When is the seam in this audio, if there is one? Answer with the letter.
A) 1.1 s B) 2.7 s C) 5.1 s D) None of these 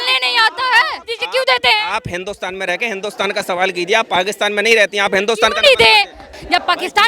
A